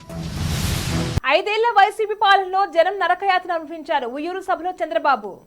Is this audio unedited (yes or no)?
no